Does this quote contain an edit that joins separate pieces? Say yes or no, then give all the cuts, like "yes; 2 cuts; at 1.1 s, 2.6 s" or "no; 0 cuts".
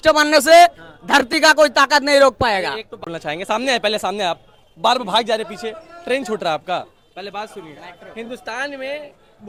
no; 0 cuts